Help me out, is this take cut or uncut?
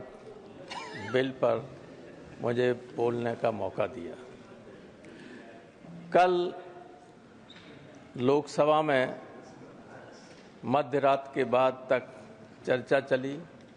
uncut